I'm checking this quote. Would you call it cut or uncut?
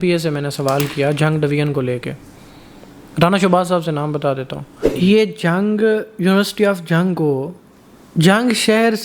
cut